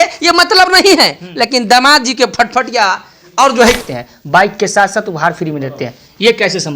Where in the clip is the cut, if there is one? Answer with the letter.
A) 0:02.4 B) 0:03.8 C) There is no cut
B